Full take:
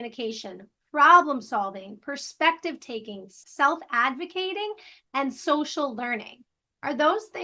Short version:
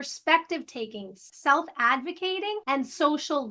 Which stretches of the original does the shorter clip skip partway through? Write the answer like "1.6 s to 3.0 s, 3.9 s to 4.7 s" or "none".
4.7 s to 5.1 s